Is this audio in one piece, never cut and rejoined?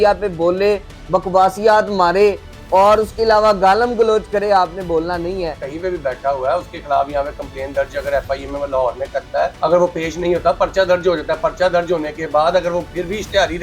no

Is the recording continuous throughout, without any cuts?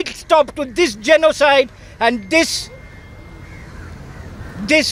yes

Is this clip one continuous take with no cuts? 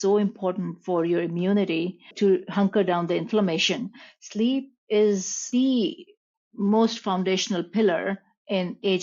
no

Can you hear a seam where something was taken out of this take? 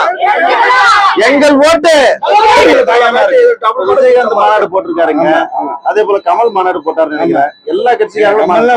yes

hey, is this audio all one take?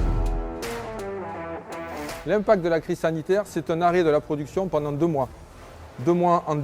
no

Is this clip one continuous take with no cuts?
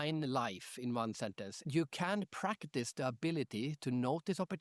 no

